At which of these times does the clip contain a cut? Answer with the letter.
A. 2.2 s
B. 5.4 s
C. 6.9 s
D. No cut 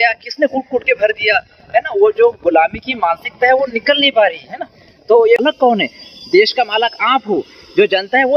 B